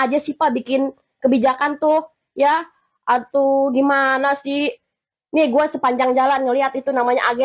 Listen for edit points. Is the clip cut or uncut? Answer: uncut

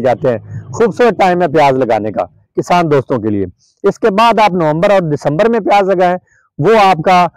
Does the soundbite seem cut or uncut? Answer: uncut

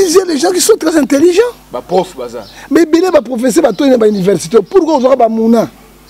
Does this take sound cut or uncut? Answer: uncut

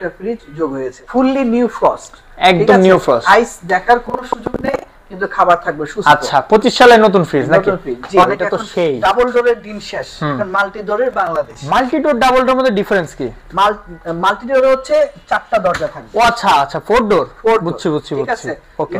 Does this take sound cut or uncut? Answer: cut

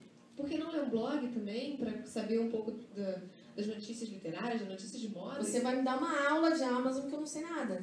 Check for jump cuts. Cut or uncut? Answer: cut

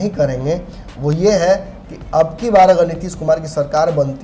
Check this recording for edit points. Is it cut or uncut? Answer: uncut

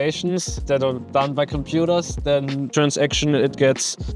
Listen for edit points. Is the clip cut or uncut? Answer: cut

